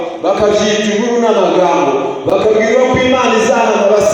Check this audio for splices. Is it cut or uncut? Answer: uncut